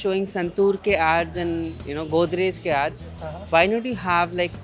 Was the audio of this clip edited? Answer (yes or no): no